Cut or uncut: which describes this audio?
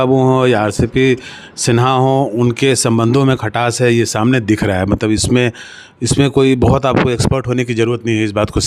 uncut